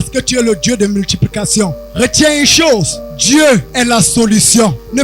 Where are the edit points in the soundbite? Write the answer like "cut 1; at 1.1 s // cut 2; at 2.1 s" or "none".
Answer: cut 1; at 1.8 s